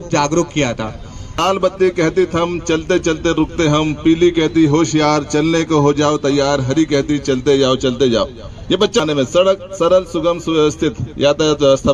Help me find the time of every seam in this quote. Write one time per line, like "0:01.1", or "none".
0:01.4
0:09.0